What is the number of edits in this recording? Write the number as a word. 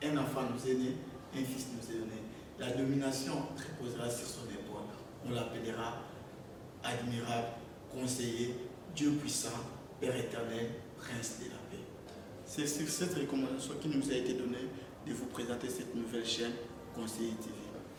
zero